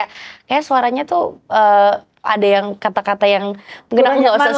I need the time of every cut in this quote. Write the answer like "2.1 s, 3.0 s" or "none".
none